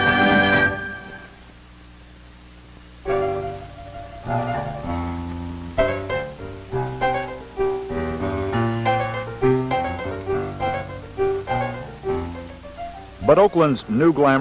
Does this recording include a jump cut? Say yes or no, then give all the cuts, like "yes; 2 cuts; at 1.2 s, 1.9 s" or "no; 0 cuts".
no; 0 cuts